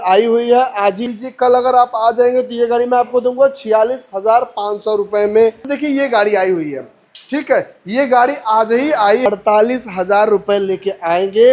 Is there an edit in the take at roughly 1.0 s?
yes; 3 cuts; at 1.0 s, 5.7 s, 9.2 s

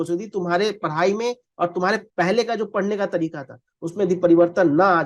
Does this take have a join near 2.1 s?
yes; 1 cut; at 2.1 s

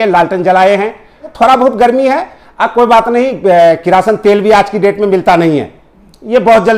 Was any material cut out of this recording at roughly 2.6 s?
no; 1 cut; at 1.2 s

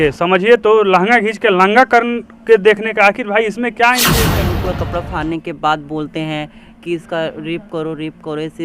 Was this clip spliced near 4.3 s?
yes; 1 cut; at 4.3 s

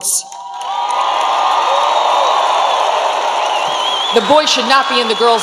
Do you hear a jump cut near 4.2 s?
no; 0 cuts

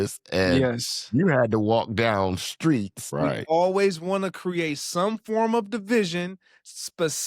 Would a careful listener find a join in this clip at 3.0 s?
yes; 1 cut; at 3.0 s

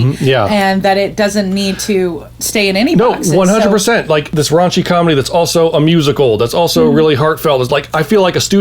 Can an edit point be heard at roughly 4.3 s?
yes; 1 cut; at 4.3 s

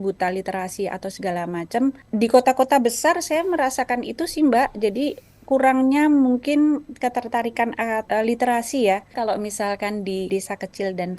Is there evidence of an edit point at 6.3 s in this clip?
no; 4 cuts; at 2.0 s, 8.0 s, 9.1 s, 10.3 s

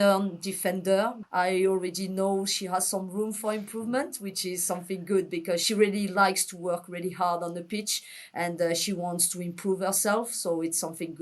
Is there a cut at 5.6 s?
yes; 2 cuts; at 1.2 s, 5.6 s

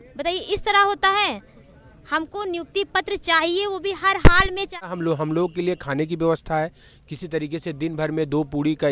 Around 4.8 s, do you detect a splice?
yes; 1 cut; at 4.8 s

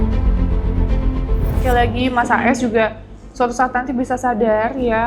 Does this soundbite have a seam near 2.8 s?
no; 1 cut; at 1.6 s

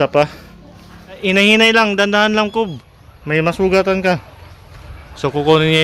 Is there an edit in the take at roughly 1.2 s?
yes; 1 cut; at 1.2 s

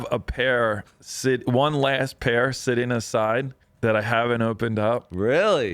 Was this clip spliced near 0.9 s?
no; 1 cut; at 3.6 s

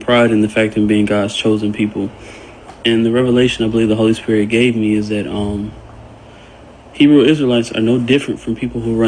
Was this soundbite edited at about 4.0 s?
yes; 1 cut; at 4.0 s

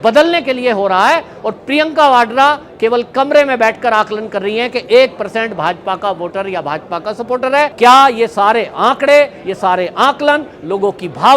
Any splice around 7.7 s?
yes; 1 cut; at 7.7 s

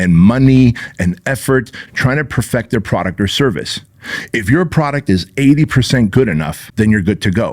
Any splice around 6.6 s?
yes; 1 cut; at 6.6 s

